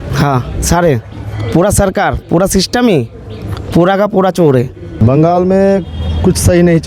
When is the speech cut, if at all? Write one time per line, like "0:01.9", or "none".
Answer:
0:05.0